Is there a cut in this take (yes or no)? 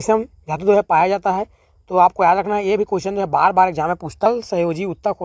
yes